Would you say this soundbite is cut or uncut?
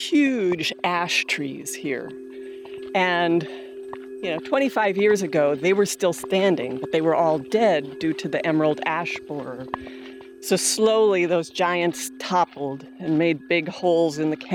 uncut